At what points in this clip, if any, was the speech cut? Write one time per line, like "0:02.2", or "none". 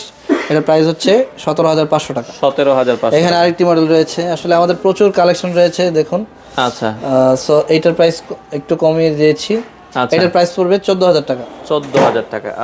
none

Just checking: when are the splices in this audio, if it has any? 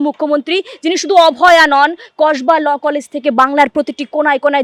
none

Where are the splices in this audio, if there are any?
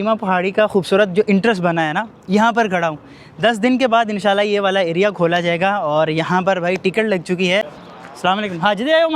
0:07.7

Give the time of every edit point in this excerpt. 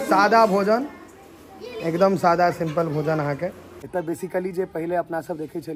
0:03.7

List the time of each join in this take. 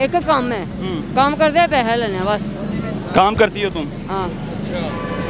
none

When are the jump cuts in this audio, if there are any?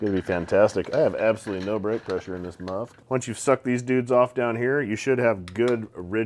0:02.9

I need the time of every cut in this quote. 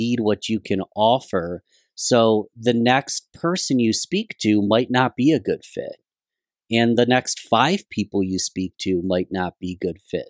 none

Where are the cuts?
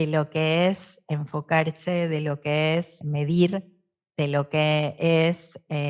0:03.0

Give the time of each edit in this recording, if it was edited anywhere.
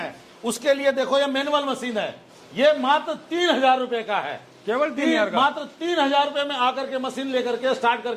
none

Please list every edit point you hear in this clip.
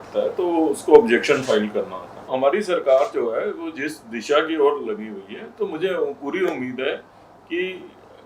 0:02.3

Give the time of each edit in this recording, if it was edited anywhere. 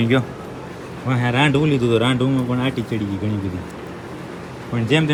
none

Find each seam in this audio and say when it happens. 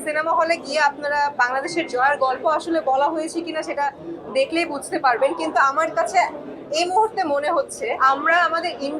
0:07.9

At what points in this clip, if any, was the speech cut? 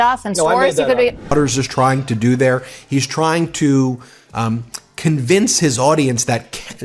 0:01.2

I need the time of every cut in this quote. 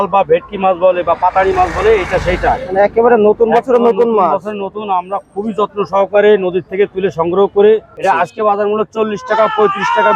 0:08.0

